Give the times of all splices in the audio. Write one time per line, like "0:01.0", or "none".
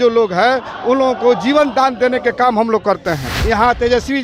0:03.3